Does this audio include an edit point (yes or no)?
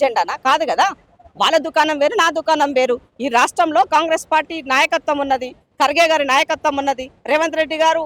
no